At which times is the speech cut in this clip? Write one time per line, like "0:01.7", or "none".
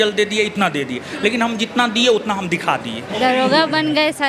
0:03.0